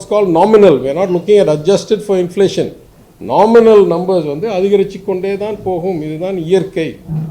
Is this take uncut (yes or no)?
yes